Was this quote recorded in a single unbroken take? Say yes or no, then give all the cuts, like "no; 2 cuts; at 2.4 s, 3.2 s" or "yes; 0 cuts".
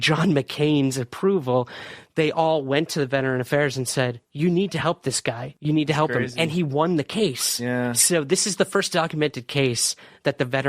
no; 2 cuts; at 4.2 s, 5.5 s